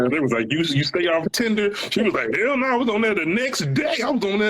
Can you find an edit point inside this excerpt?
yes; 1 cut; at 1.3 s

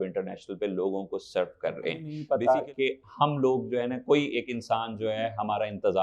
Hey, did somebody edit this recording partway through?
yes; 1 cut; at 2.2 s

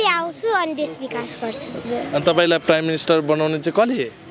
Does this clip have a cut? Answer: yes; 1 cut; at 1.8 s

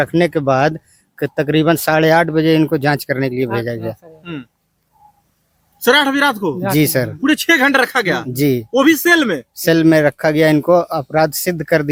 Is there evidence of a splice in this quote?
no; 0 cuts

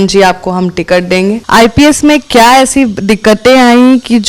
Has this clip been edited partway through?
yes; 1 cut; at 1.4 s

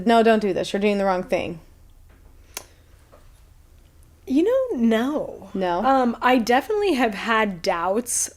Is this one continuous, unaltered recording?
yes; 0 cuts

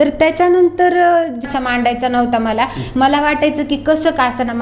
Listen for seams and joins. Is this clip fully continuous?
no; 1 cut; at 1.4 s

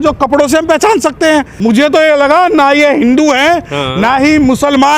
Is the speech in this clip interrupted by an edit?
yes; 1 cut; at 1.5 s

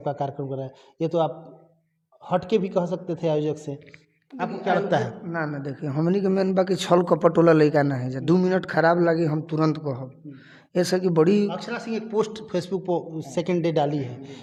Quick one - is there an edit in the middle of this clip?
no; 0 cuts

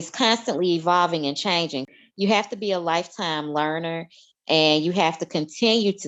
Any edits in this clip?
no; 0 cuts

